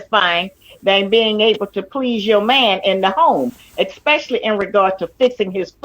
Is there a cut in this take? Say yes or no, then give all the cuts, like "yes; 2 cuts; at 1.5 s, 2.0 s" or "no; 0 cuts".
yes; 1 cut; at 2.8 s